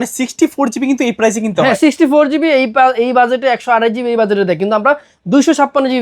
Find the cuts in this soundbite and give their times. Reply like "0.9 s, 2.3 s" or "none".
none